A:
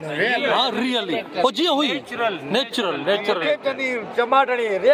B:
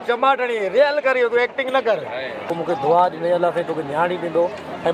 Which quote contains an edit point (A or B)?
B